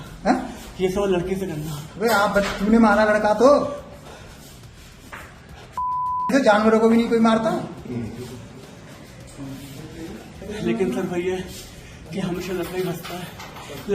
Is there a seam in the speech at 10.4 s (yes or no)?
yes